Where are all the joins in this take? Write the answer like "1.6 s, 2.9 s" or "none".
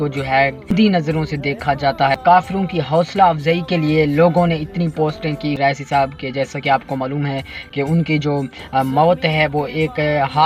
0.7 s, 2.2 s, 5.6 s